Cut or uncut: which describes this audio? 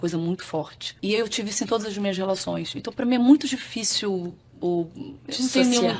cut